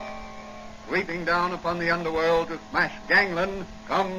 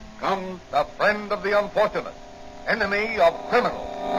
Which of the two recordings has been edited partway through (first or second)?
second